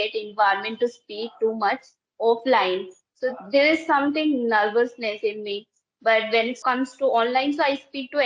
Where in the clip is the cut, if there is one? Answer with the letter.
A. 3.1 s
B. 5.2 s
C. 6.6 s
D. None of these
C